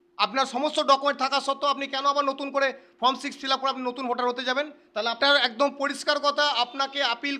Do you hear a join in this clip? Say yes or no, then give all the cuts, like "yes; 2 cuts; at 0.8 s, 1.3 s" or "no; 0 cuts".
yes; 1 cut; at 5.2 s